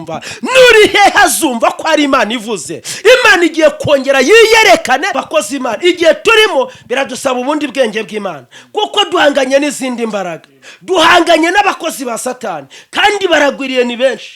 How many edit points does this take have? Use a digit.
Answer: 1